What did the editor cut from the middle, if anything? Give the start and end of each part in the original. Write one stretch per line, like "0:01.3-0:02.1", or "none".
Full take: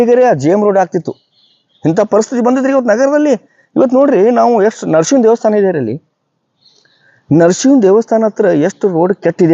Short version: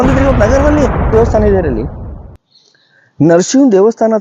0:03.6-0:05.2